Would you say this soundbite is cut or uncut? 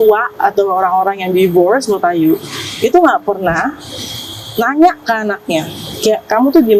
uncut